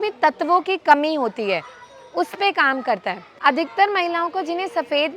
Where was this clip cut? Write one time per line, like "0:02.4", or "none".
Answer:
0:03.2